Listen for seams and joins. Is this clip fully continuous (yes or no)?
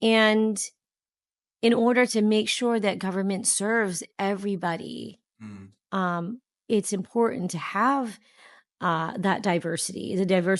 yes